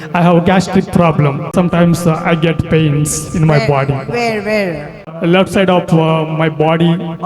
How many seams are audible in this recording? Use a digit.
2